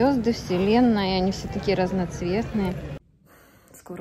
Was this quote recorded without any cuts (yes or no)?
no